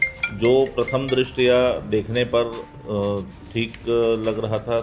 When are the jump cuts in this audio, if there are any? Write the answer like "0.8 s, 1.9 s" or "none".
none